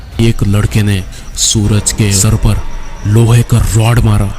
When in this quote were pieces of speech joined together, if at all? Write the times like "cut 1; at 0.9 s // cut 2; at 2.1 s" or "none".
cut 1; at 2.4 s